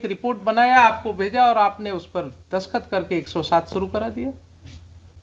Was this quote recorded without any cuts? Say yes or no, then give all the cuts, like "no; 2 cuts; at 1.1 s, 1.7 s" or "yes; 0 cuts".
yes; 0 cuts